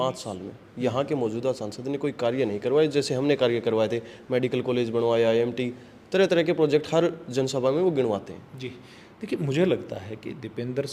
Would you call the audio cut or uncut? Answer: uncut